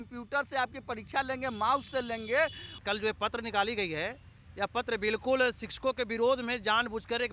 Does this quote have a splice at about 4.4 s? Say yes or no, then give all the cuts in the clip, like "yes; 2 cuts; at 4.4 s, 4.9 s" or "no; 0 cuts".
no; 1 cut; at 2.8 s